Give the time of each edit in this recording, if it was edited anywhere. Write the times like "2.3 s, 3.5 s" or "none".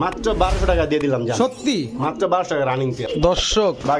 3.1 s